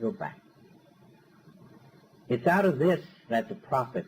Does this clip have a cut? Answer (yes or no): yes